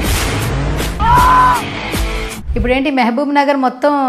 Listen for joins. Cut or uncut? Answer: cut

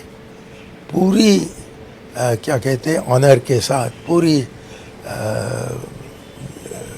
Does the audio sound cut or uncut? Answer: uncut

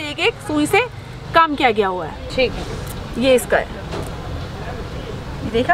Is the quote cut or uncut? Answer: cut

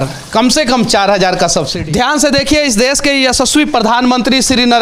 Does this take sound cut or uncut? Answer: cut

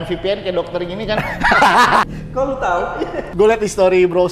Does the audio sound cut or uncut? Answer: cut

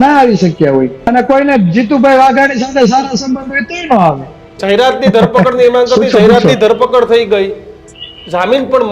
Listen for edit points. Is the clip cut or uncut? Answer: cut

